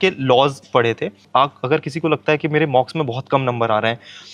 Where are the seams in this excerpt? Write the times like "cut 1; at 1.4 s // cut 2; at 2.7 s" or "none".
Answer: cut 1; at 1.2 s